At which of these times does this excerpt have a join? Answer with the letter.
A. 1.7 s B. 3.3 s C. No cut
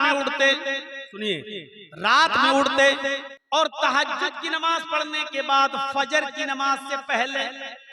B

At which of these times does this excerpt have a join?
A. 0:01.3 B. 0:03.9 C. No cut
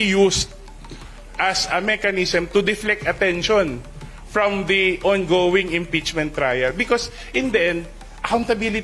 C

